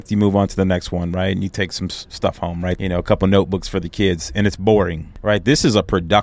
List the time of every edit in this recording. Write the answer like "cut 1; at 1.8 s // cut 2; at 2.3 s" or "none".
cut 1; at 2.8 s // cut 2; at 5.1 s

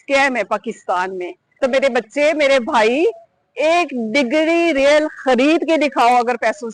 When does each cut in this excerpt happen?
cut 1; at 1.4 s

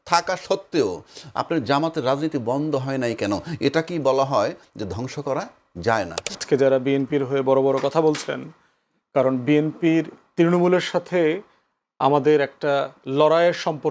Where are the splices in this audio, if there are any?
cut 1; at 6.4 s

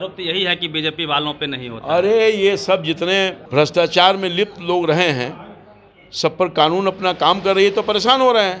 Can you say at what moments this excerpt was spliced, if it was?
cut 1; at 3.4 s

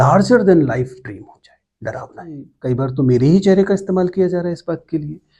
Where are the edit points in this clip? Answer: cut 1; at 2.5 s

